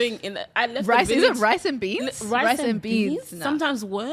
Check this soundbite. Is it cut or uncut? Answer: uncut